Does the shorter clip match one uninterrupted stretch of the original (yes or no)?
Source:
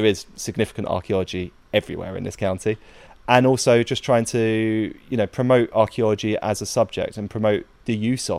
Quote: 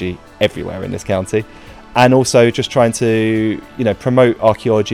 yes